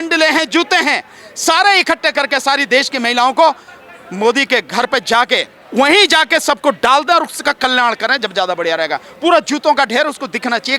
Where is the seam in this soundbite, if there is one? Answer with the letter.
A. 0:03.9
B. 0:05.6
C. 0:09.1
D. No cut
B